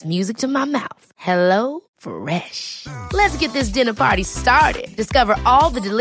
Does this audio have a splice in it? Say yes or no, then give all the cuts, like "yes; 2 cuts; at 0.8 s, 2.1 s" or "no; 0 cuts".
no; 0 cuts